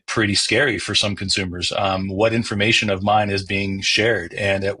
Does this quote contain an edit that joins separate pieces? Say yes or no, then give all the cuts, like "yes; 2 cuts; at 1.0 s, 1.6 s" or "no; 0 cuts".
no; 0 cuts